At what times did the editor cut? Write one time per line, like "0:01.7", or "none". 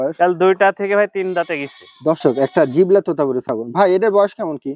0:02.2